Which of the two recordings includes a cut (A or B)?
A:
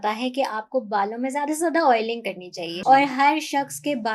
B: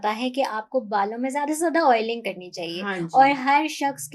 A